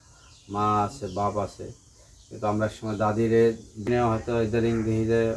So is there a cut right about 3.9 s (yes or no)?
yes